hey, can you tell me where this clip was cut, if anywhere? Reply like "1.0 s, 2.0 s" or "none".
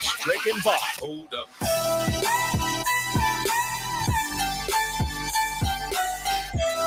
none